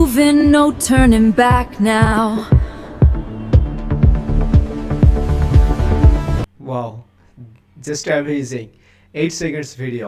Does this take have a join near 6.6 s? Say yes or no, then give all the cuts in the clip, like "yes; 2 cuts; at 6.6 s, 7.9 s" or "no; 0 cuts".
yes; 1 cut; at 6.6 s